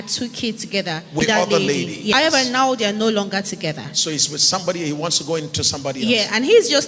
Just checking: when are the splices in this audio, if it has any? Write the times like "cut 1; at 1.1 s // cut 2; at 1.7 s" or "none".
cut 1; at 1.2 s // cut 2; at 2.1 s